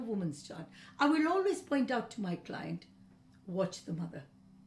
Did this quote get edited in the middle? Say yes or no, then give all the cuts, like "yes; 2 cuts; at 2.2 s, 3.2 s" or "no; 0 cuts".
no; 0 cuts